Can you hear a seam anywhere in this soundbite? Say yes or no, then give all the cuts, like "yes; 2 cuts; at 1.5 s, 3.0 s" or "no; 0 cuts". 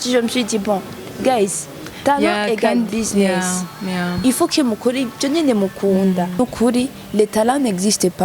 yes; 1 cut; at 6.4 s